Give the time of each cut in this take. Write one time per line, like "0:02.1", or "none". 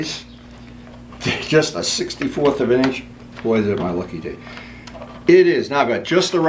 none